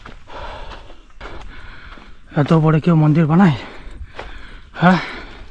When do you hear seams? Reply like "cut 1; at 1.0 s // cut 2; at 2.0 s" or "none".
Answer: cut 1; at 1.2 s